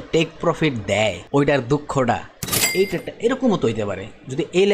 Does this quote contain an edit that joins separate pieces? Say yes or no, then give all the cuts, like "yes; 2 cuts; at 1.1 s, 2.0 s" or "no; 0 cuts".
yes; 2 cuts; at 1.2 s, 2.6 s